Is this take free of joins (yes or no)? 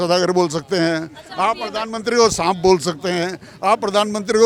yes